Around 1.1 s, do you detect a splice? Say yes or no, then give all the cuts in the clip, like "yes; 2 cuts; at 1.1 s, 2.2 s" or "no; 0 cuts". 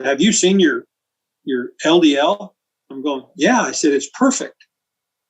no; 0 cuts